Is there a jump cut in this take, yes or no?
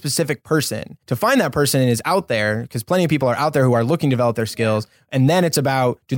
yes